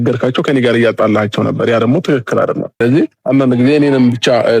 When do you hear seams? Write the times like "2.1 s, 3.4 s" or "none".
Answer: 2.7 s